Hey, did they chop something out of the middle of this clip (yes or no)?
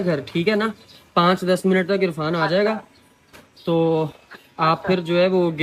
no